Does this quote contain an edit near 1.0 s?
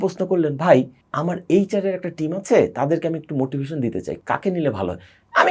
yes; 2 cuts; at 1.0 s, 4.2 s

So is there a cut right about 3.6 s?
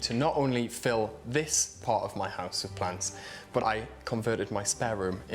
yes; 1 cut; at 3.6 s

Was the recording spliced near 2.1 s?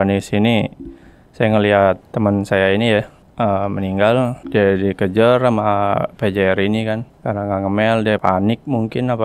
yes; 5 cuts; at 2.1 s, 3.2 s, 4.4 s, 7.1 s, 8.2 s

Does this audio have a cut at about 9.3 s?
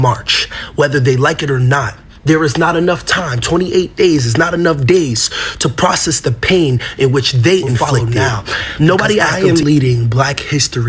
yes; 1 cut; at 9.3 s

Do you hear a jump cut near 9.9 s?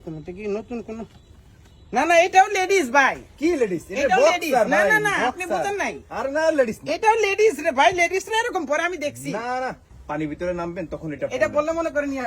yes; 1 cut; at 9.9 s

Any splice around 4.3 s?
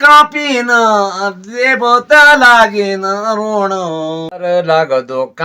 yes; 1 cut; at 4.3 s

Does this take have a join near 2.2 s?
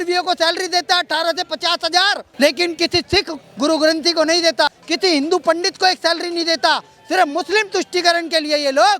yes; 2 cuts; at 2.2 s, 4.8 s

